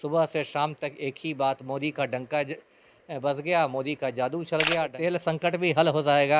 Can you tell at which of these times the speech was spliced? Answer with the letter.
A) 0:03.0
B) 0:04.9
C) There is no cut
B